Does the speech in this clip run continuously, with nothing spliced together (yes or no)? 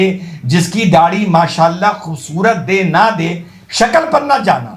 yes